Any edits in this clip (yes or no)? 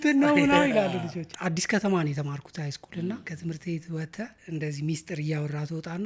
yes